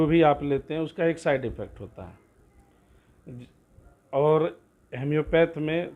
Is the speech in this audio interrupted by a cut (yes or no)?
no